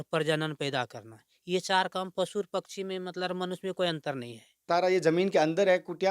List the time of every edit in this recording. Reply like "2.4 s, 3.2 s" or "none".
4.7 s